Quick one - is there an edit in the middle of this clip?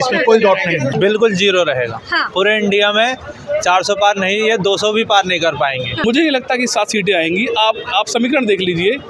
yes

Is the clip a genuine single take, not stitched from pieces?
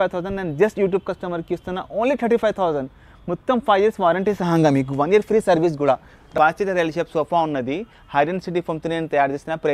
no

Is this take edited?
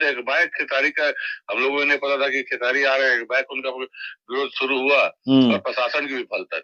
no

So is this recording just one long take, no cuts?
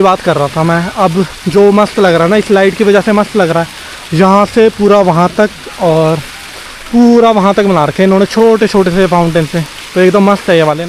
yes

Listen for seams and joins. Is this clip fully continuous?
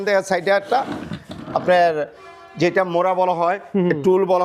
yes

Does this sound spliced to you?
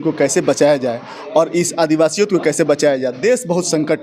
no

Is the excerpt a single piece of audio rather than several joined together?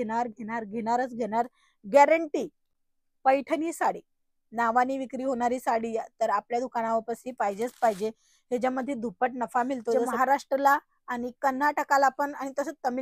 no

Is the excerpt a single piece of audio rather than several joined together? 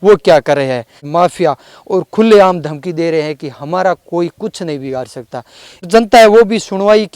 no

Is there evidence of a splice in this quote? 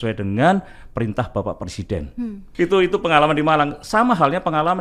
no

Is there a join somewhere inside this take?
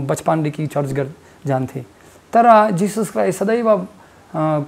no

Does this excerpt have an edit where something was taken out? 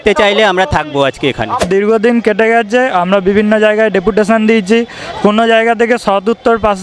yes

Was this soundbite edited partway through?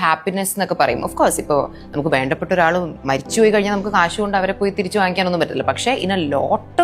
no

